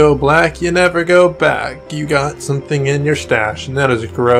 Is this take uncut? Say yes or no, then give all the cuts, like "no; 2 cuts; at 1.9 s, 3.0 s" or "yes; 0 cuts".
yes; 0 cuts